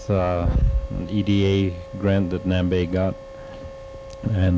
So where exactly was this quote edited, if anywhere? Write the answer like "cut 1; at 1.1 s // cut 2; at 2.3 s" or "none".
none